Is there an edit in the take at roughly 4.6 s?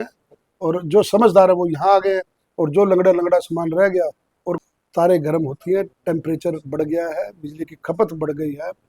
yes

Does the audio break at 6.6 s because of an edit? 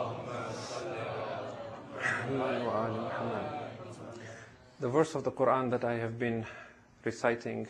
no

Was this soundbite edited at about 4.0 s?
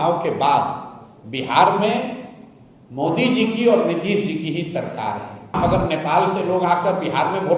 no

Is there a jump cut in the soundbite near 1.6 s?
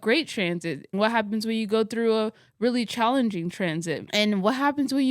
no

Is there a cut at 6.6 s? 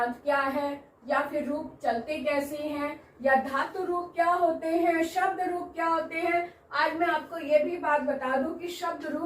yes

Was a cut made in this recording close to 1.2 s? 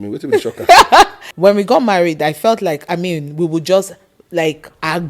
yes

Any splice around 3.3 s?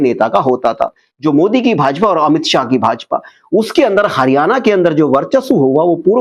no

